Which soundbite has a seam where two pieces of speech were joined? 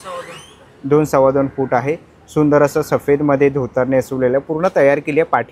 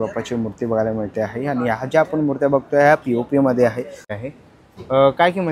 second; 1 cut; at 4.2 s

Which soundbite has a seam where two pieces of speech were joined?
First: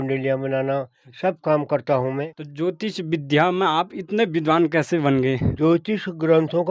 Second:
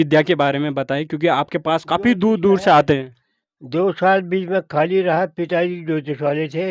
first; 2 cuts; at 2.4 s, 5.5 s

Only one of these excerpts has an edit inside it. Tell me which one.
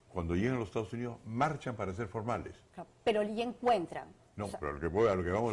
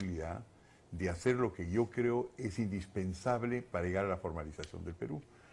second; 1 cut; at 1.0 s

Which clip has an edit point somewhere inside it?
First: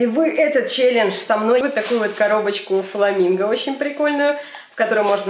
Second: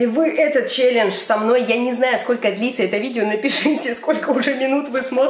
first; 1 cut; at 1.6 s

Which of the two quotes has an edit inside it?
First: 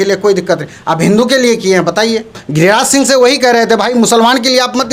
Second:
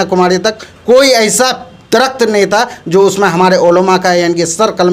first; 1 cut; at 2.4 s

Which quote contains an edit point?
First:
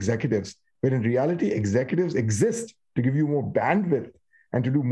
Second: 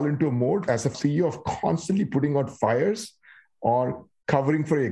second; 1 cut; at 0.9 s

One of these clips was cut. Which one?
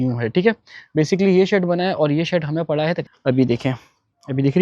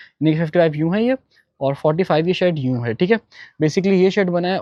first; 1 cut; at 3.0 s

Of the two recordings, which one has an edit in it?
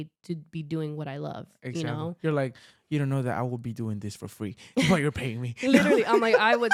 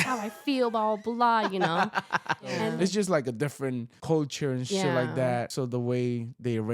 second; 3 cuts; at 2.7 s, 3.9 s, 5.5 s

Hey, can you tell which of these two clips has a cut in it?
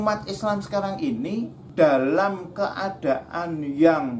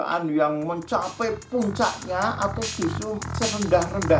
second; 1 cut; at 3.2 s

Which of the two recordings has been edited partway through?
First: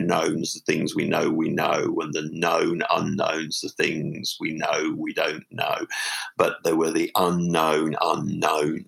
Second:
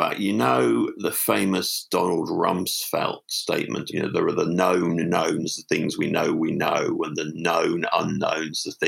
second; 1 cut; at 3.9 s

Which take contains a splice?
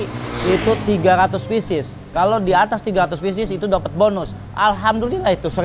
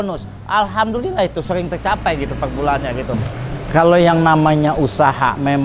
second; 1 cut; at 3.1 s

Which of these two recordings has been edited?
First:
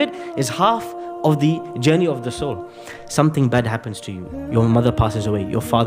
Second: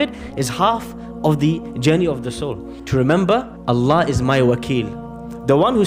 second; 2 cuts; at 2.7 s, 3.5 s

